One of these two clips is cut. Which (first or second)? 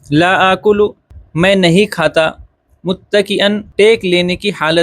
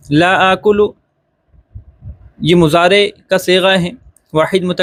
first